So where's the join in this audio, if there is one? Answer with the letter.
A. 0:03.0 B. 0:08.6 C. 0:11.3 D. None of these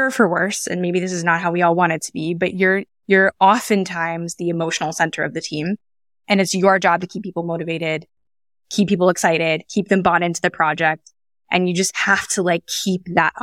D